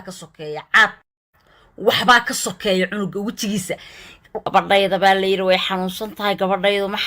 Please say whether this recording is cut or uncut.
cut